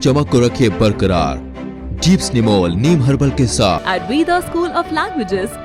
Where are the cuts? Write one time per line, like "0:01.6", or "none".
0:03.8